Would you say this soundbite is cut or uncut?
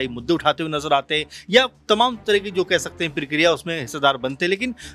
uncut